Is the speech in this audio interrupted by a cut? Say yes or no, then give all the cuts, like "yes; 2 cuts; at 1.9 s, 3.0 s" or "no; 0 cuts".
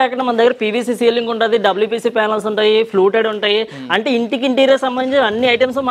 no; 0 cuts